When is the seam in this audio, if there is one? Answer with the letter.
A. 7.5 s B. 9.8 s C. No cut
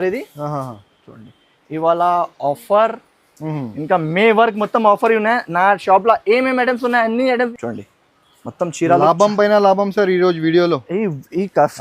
A